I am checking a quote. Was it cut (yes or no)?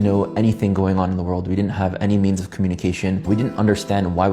yes